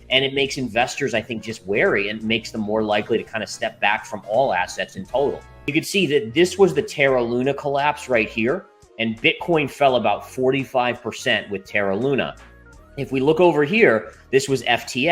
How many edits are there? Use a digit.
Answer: 1